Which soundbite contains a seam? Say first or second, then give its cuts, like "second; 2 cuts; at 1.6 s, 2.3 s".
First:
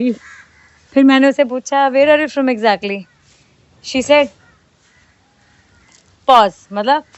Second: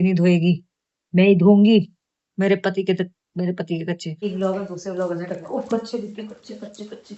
second; 1 cut; at 4.2 s